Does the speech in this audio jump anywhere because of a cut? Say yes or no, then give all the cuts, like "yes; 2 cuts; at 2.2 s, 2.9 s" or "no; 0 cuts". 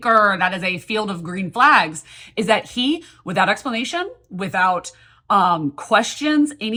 no; 0 cuts